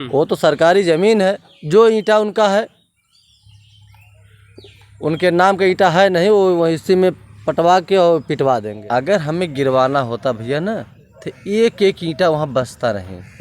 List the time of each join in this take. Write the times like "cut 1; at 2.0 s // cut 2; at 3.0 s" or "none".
cut 1; at 1.5 s // cut 2; at 8.7 s